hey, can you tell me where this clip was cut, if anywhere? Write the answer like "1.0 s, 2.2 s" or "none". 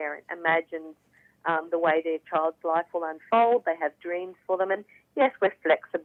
none